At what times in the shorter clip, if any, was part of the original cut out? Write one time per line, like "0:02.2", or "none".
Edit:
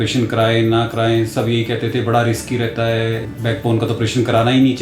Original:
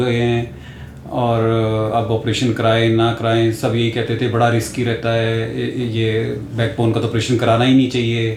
0:03.3